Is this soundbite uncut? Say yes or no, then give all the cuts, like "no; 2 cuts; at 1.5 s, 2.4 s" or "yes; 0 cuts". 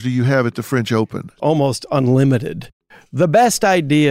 no; 2 cuts; at 1.3 s, 2.8 s